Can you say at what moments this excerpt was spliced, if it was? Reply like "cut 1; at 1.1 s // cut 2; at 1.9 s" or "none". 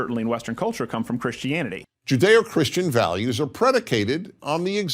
cut 1; at 1.8 s